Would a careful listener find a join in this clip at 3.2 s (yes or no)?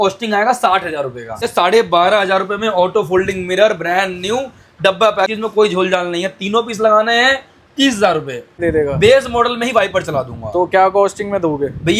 no